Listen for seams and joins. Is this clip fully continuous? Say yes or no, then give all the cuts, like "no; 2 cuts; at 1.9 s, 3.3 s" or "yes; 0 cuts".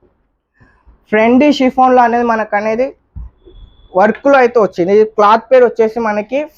yes; 0 cuts